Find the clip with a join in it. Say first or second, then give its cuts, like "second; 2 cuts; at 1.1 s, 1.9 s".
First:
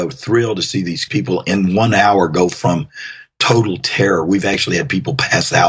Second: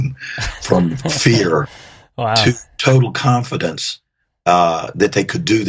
first; 1 cut; at 1.1 s